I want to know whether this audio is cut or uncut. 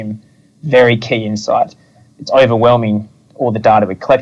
cut